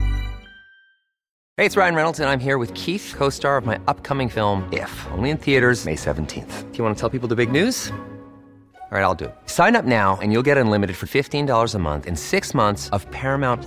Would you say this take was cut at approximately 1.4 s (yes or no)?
yes